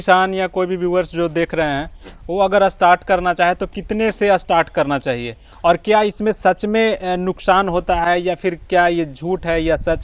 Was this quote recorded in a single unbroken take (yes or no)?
yes